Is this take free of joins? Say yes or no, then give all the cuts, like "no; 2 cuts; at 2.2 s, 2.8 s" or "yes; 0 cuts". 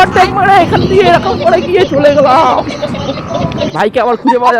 no; 1 cut; at 3.7 s